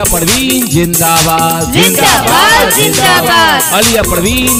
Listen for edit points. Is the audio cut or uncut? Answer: uncut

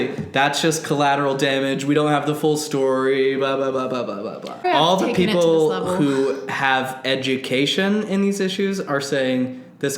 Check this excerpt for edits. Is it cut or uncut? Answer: cut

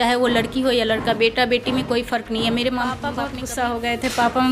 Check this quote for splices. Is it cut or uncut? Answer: cut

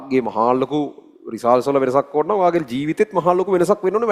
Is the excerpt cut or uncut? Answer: uncut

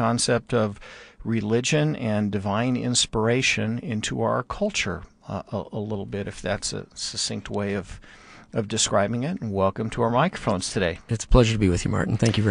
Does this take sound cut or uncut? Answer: cut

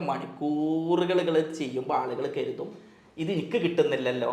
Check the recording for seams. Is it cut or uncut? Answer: uncut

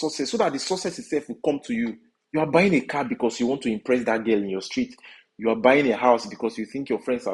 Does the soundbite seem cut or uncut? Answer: cut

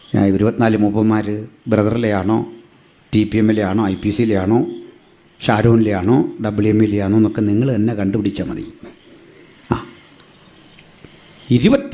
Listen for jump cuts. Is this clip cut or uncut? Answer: uncut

